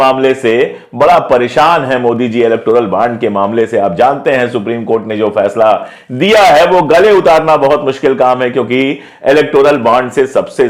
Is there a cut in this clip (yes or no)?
no